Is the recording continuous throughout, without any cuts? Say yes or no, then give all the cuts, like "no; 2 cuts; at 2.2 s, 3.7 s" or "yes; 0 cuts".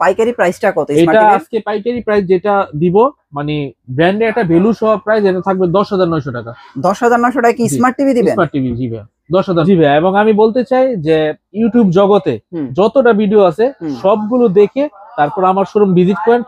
no; 1 cut; at 9.6 s